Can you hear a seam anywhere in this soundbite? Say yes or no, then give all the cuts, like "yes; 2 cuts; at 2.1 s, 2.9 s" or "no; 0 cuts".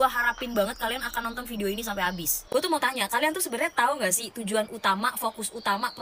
no; 0 cuts